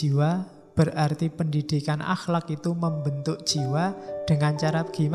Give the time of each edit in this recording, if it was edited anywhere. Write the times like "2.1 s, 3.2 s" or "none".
none